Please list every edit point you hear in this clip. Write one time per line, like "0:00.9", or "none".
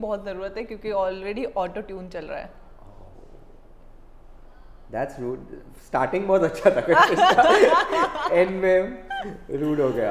none